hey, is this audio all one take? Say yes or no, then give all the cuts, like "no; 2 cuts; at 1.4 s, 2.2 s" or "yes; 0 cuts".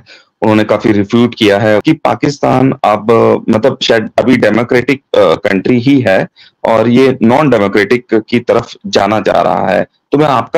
no; 1 cut; at 1.8 s